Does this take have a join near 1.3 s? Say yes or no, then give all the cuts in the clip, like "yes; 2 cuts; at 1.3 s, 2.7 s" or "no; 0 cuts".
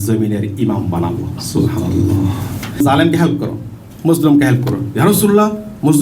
no; 1 cut; at 2.8 s